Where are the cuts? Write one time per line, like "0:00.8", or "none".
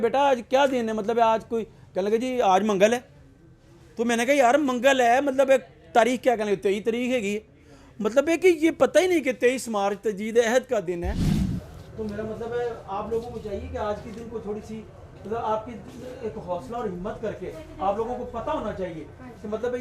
0:11.4

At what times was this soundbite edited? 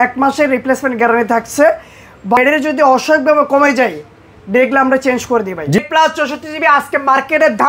0:02.4
0:05.8

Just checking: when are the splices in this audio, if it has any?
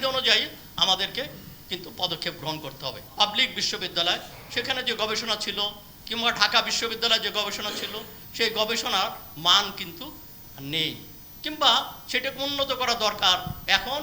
0:03.0

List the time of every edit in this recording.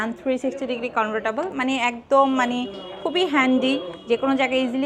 none

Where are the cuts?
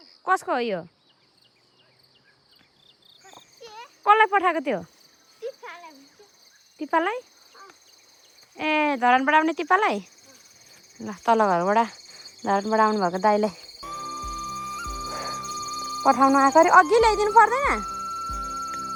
none

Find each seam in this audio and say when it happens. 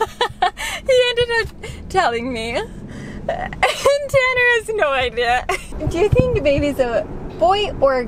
0:05.7

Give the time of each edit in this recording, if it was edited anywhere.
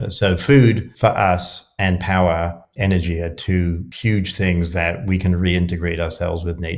0:00.9
0:02.6
0:03.9

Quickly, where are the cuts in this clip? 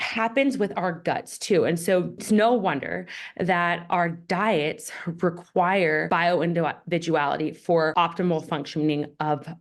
0:02.2
0:06.0
0:07.9

